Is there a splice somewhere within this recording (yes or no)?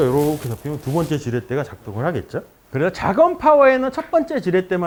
no